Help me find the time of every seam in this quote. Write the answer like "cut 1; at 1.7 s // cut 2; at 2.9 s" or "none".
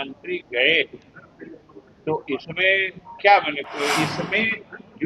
cut 1; at 3.9 s